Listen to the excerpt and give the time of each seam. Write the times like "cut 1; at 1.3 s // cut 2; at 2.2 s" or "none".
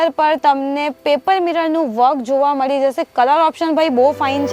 none